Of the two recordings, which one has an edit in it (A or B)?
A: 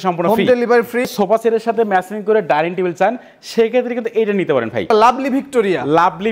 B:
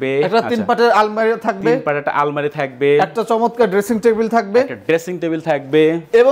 A